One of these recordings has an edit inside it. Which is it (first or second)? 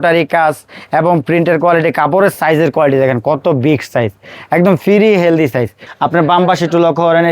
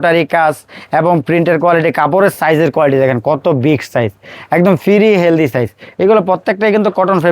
first